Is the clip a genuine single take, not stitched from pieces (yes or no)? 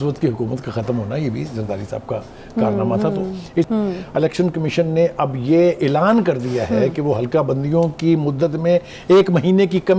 no